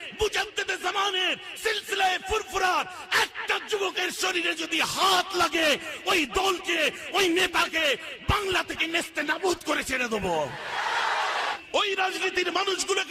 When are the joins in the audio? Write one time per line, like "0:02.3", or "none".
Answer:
0:11.5

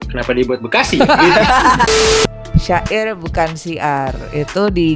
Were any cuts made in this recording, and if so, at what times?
0:01.8

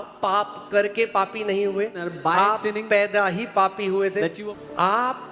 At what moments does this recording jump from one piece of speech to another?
0:02.0
0:04.4

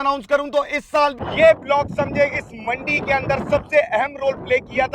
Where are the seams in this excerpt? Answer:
0:01.2

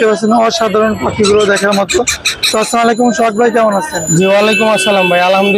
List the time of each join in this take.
none

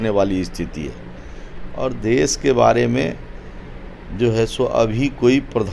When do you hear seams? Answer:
none

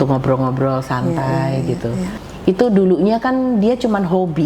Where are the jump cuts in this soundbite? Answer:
0:02.2

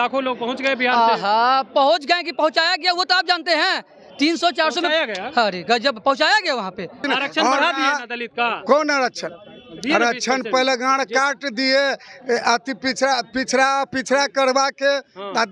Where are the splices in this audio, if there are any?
0:07.0

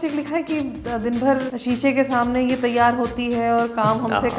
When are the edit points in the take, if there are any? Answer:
0:01.5

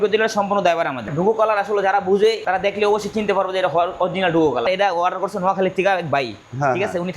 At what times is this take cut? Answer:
0:01.1
0:02.4
0:04.7

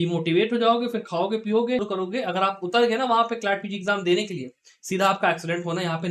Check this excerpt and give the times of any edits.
0:01.8

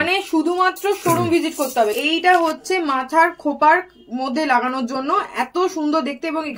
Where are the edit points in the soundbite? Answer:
0:02.0

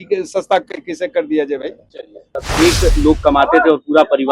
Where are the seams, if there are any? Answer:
0:02.5

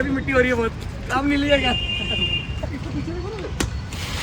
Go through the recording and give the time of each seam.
0:02.7

